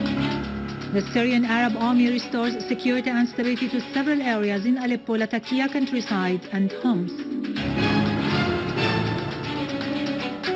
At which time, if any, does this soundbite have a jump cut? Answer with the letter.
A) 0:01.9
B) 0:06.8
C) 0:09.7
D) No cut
A